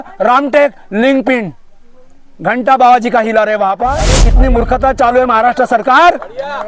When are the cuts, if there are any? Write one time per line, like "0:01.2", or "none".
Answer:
0:04.2